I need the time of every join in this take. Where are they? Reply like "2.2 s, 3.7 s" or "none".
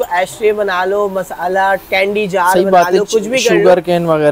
none